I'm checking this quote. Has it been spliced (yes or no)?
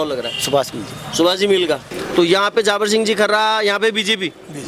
yes